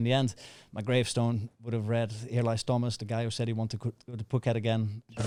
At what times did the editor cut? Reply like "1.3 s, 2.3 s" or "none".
none